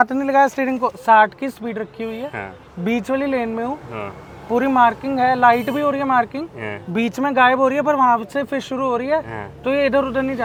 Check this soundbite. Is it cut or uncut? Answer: uncut